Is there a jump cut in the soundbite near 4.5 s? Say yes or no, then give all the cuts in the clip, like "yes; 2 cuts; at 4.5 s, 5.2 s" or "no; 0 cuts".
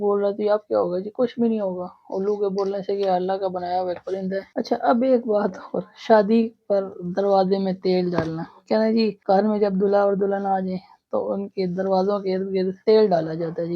no; 0 cuts